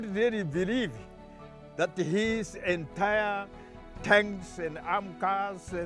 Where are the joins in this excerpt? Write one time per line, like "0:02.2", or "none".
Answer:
none

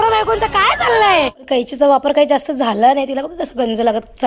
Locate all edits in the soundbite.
0:01.4

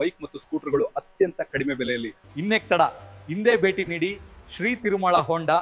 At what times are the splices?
0:02.2

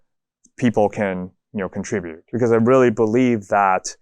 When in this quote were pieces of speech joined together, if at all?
0:02.3

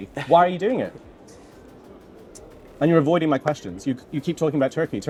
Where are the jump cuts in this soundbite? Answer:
none

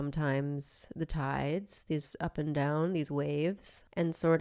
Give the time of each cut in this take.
none

